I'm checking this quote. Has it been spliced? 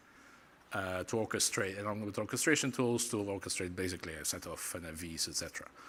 no; 0 cuts

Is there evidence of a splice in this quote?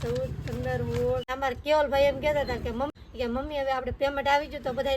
yes; 2 cuts; at 1.3 s, 2.9 s

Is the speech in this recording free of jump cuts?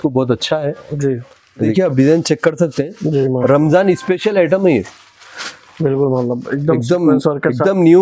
no; 1 cut; at 1.6 s

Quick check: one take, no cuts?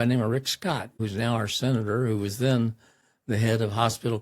no; 1 cut; at 1.0 s

